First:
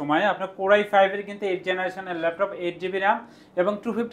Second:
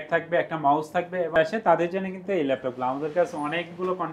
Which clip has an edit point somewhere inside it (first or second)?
second